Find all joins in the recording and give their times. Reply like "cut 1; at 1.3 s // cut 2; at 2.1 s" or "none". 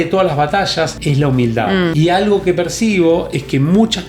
cut 1; at 1.0 s // cut 2; at 1.9 s